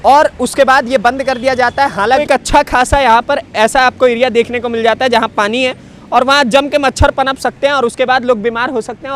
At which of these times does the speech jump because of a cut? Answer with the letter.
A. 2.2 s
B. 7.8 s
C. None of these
A